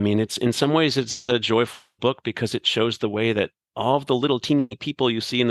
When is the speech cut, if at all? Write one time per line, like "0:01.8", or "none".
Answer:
none